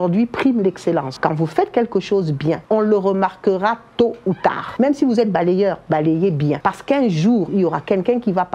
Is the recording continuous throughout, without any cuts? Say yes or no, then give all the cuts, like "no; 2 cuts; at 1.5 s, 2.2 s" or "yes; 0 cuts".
no; 4 cuts; at 1.1 s, 2.6 s, 4.6 s, 6.6 s